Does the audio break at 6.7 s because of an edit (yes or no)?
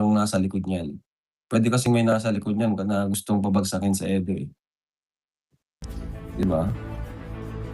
yes